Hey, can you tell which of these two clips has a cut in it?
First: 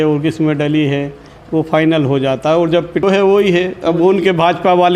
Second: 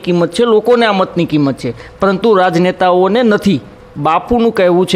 first; 1 cut; at 3.0 s

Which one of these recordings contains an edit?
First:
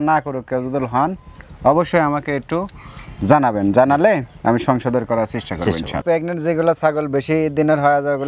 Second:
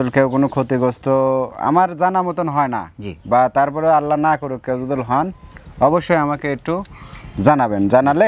first; 1 cut; at 6.0 s

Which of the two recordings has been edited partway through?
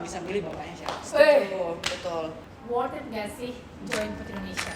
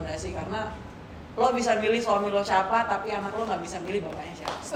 first; 1 cut; at 2.5 s

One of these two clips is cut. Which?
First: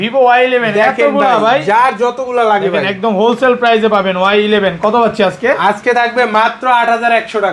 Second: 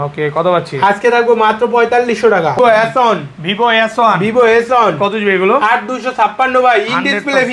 second; 1 cut; at 2.6 s

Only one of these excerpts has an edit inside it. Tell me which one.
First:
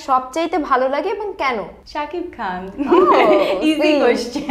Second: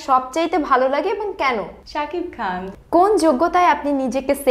second; 1 cut; at 2.6 s

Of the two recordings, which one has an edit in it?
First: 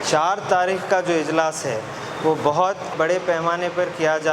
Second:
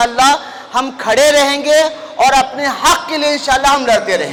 first; 1 cut; at 2.9 s

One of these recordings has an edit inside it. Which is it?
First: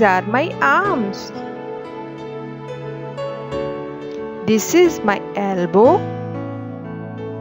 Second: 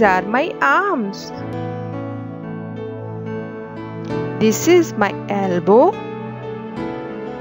first; 4 cuts; at 1.1 s, 2.6 s, 4.4 s, 6.0 s

